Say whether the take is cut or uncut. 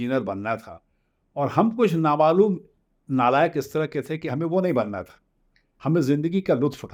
uncut